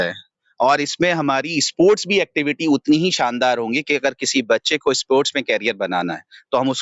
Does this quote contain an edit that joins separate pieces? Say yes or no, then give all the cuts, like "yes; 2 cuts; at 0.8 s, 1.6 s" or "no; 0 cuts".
no; 0 cuts